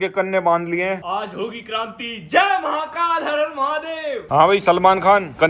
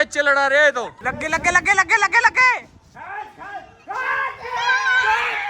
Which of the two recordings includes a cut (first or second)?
first